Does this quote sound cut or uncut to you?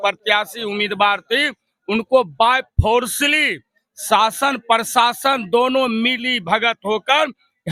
uncut